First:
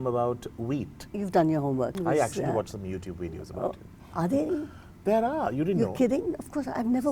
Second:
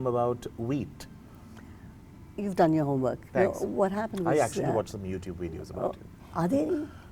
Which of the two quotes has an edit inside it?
first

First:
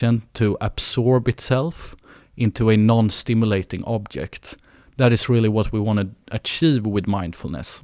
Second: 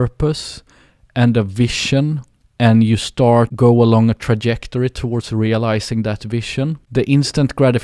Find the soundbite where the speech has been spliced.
second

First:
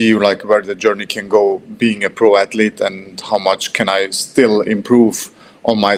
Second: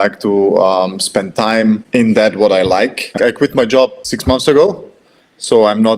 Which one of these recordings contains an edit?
second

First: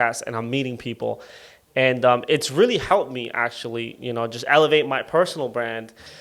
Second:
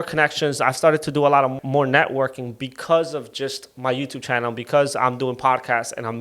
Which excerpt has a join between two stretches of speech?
second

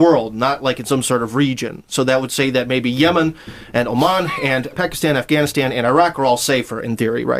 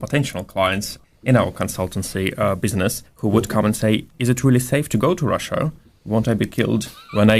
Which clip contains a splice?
second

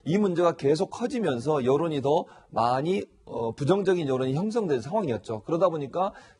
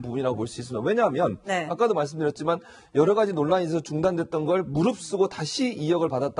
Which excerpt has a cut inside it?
second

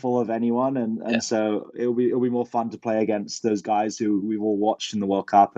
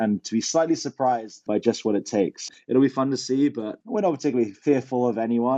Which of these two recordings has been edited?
second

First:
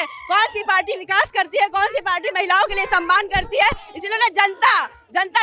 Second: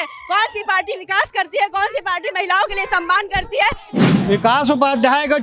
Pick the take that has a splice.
second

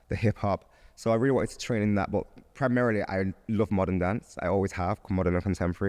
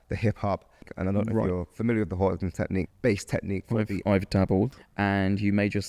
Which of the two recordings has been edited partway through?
second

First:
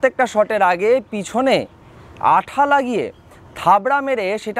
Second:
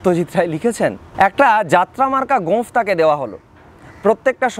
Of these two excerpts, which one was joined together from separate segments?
second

